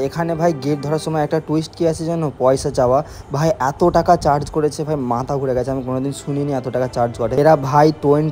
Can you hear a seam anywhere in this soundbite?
no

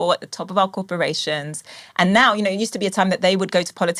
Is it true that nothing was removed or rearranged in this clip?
yes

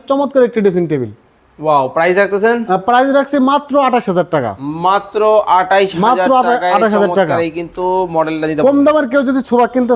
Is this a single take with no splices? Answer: yes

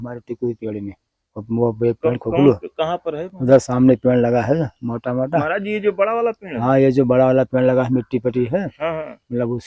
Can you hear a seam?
no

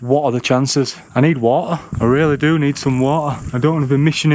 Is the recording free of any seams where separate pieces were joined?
no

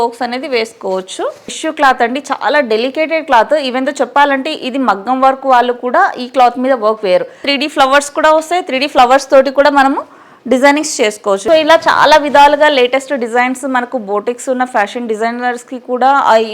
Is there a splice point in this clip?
yes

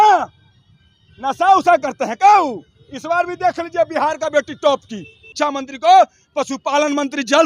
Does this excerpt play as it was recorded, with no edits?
no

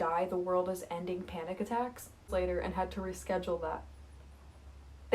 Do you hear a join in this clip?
yes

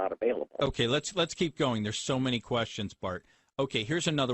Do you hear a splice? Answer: yes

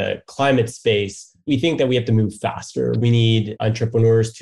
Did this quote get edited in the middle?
yes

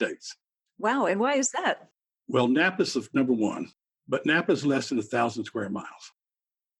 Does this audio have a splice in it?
yes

